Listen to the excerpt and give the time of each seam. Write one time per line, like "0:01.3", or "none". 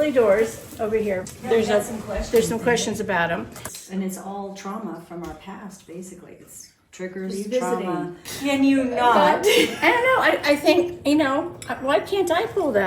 0:01.3
0:03.7
0:08.2